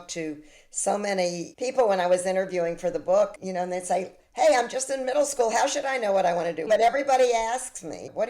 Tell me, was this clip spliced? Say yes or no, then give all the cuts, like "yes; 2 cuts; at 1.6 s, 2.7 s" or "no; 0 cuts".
yes; 1 cut; at 6.6 s